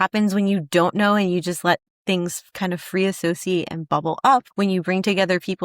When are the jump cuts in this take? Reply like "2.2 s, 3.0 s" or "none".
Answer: 4.5 s